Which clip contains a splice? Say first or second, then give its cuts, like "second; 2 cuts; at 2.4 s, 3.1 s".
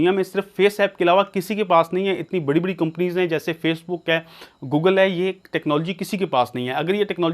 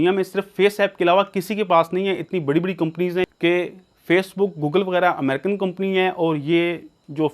second; 1 cut; at 3.3 s